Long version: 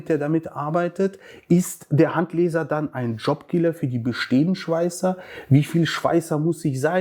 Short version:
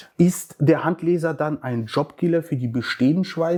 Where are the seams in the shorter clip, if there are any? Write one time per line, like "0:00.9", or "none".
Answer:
none